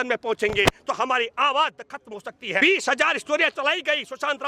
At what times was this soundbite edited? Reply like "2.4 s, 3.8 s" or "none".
2.6 s